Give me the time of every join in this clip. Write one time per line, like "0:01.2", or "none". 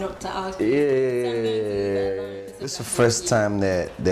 0:02.7